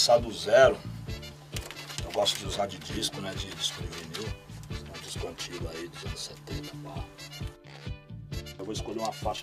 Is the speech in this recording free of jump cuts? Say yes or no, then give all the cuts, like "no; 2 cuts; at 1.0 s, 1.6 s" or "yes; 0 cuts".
no; 1 cut; at 5.7 s